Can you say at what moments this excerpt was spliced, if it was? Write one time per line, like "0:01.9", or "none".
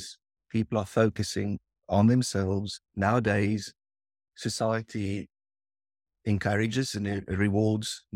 none